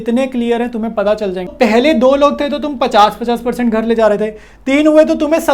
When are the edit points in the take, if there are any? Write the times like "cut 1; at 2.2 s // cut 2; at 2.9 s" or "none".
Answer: cut 1; at 1.5 s